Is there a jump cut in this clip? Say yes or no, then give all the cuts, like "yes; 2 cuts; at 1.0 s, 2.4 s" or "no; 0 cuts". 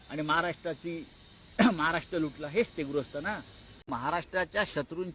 yes; 1 cut; at 3.8 s